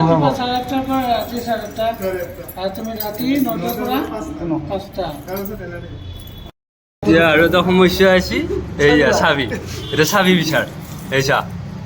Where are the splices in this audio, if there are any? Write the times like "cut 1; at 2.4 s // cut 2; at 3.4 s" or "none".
cut 1; at 6.5 s